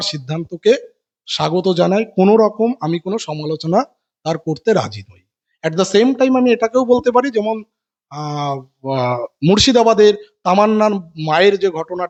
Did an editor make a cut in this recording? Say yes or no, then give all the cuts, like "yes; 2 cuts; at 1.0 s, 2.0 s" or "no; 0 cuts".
no; 0 cuts